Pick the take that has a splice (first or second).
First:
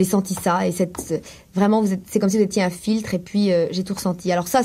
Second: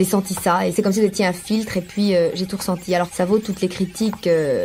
second